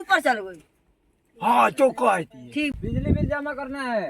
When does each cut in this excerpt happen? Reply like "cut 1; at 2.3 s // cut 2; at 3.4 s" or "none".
cut 1; at 2.7 s